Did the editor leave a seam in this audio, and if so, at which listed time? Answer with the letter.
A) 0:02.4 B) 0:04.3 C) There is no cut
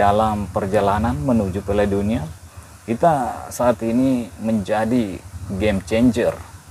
A